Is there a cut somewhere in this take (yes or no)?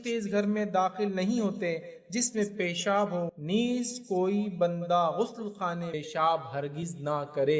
yes